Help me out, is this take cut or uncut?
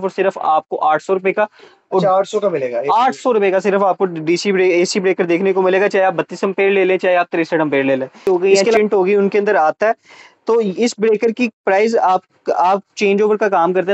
cut